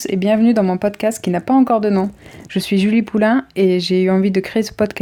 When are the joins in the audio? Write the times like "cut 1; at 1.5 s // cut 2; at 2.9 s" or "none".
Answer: none